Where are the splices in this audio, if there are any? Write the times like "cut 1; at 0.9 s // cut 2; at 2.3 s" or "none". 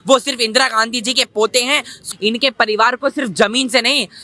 cut 1; at 1.9 s